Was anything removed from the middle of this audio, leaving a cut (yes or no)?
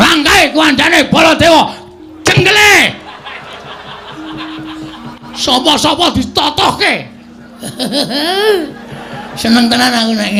no